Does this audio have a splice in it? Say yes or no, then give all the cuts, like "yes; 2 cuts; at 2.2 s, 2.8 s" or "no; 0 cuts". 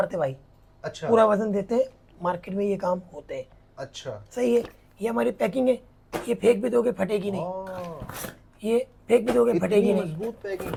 no; 0 cuts